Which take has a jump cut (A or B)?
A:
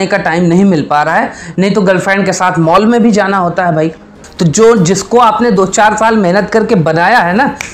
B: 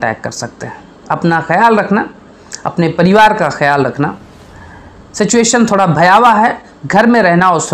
A